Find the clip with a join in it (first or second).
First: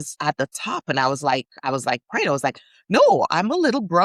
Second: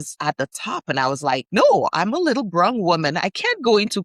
second